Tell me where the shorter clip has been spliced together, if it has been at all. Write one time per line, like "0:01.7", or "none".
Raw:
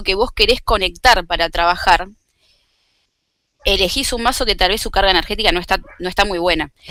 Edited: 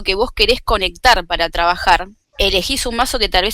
0:02.2